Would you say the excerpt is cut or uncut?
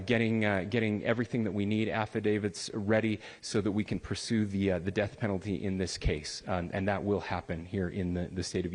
uncut